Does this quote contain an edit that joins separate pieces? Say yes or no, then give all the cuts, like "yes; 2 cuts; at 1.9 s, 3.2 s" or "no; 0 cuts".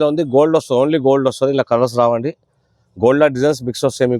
no; 0 cuts